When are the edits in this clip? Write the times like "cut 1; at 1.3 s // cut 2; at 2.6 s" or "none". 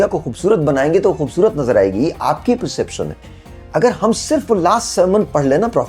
cut 1; at 3.3 s